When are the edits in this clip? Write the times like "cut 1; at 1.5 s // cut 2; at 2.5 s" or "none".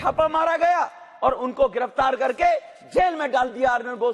none